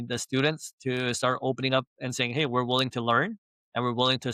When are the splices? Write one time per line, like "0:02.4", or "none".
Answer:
none